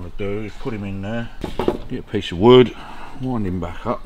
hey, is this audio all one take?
no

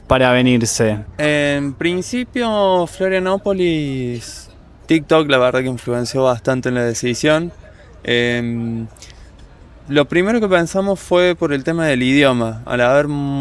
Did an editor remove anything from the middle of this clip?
no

